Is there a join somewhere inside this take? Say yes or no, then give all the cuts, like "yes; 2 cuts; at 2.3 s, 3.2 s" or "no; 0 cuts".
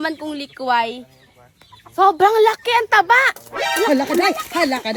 no; 0 cuts